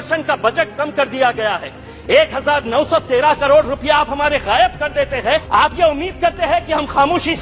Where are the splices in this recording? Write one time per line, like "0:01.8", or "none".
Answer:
0:05.5